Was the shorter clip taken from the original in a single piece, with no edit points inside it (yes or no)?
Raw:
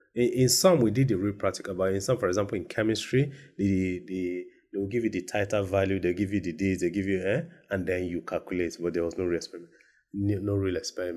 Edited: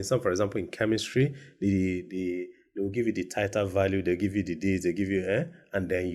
yes